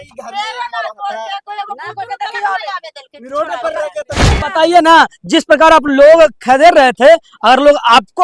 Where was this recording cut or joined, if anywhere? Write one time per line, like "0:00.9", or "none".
0:04.3